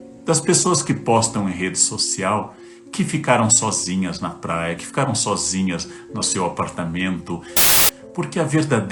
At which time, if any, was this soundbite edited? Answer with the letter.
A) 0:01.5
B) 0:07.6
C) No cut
B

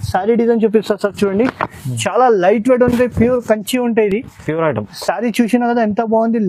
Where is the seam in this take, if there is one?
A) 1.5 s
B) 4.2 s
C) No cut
C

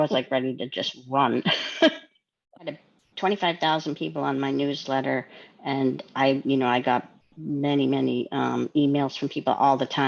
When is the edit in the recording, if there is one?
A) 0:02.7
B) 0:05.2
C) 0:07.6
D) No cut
A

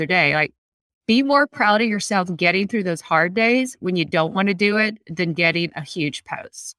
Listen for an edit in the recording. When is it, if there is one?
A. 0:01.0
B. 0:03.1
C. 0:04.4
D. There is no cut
D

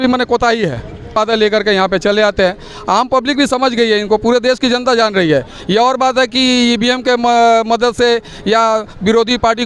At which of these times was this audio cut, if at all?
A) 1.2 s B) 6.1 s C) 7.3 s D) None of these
A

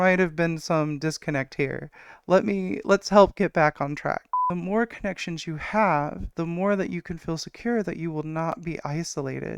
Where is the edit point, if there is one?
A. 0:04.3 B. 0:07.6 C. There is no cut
A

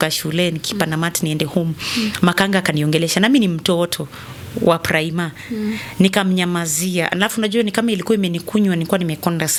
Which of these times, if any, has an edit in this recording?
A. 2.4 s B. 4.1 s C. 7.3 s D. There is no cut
D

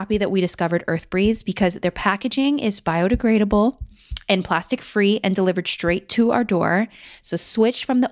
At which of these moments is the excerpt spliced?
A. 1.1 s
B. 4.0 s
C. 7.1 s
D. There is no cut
C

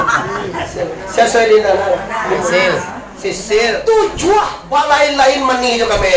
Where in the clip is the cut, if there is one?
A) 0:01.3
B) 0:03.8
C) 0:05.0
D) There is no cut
B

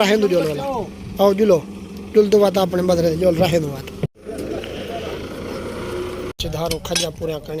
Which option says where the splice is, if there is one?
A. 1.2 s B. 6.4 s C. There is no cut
B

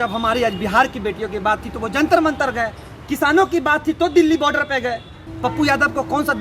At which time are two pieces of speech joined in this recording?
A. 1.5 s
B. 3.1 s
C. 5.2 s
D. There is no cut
C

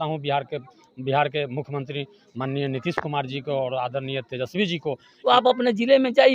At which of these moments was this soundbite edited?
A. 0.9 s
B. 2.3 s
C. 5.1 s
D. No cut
C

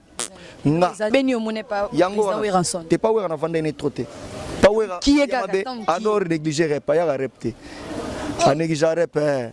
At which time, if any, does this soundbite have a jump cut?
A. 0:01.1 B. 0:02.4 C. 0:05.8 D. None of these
A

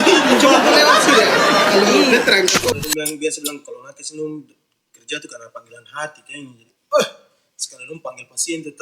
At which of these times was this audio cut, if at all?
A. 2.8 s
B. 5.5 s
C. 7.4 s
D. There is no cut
A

